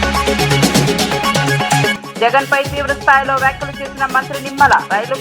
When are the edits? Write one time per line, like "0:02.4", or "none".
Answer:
0:02.0